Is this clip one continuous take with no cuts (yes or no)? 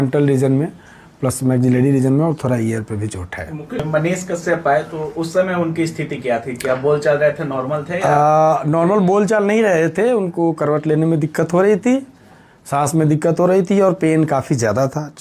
no